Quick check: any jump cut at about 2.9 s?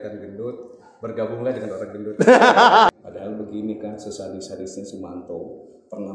yes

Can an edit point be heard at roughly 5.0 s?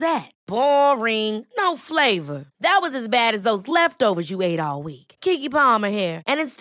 no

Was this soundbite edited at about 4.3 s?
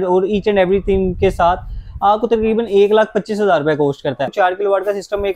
yes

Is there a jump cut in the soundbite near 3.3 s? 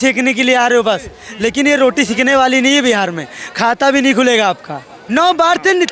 no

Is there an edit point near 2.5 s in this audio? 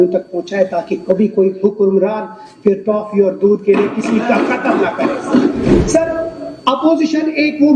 no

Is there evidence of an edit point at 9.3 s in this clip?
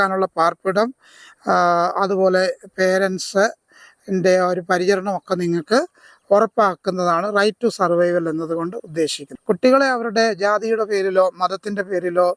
yes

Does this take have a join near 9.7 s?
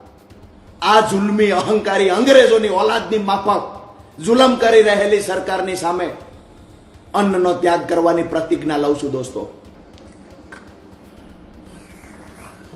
yes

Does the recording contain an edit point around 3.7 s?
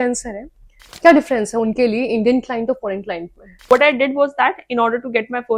yes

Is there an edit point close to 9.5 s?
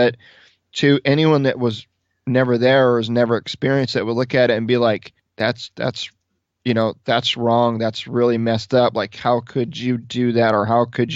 no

